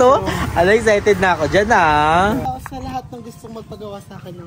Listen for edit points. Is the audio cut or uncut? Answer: cut